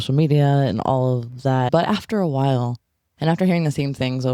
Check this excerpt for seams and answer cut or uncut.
cut